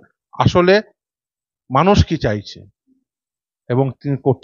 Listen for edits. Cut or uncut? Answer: uncut